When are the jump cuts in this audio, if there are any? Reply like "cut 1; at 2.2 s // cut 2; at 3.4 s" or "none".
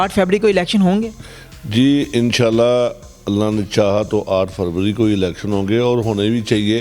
none